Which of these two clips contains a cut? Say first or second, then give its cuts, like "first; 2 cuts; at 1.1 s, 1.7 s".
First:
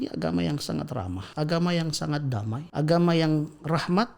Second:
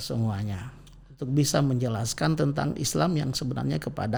first; 2 cuts; at 1.2 s, 2.6 s